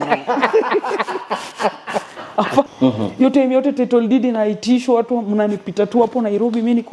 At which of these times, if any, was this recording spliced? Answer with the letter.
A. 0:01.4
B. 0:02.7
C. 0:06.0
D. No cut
B